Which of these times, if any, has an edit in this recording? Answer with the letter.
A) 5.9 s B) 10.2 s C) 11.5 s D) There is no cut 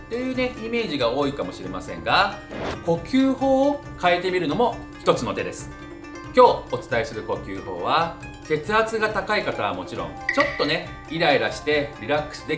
B